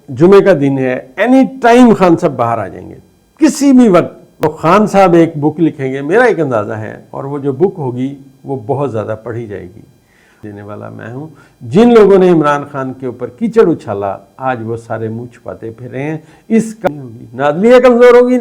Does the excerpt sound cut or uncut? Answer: cut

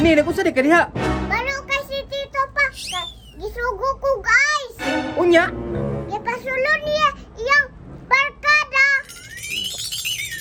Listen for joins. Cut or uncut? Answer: uncut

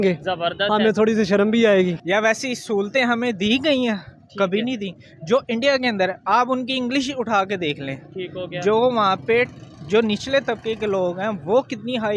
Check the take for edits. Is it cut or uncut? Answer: cut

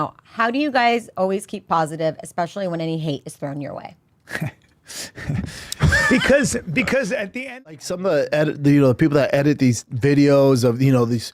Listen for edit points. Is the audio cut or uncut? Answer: cut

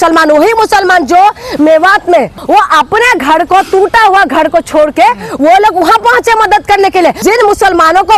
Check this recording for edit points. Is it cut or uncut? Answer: cut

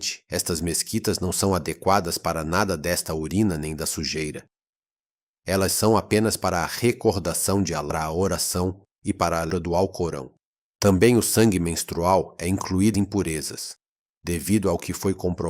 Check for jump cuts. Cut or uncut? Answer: cut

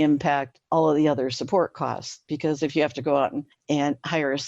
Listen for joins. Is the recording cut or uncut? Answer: cut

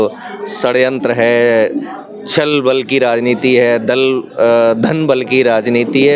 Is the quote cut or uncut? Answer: uncut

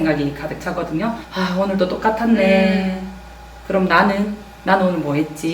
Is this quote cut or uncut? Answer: cut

